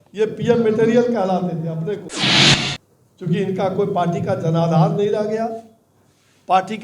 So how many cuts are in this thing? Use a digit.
1